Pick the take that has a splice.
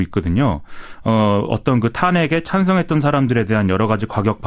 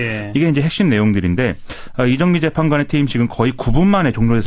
second; 1 cut; at 1.3 s

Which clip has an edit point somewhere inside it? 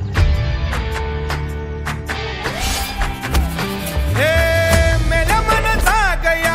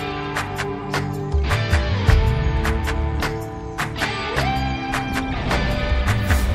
second; 1 cut; at 1.0 s

